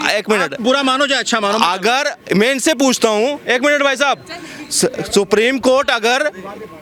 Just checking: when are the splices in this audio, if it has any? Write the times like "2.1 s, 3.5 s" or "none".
none